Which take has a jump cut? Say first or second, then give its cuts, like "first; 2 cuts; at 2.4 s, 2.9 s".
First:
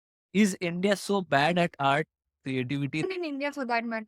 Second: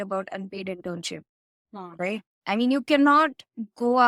first; 1 cut; at 3.0 s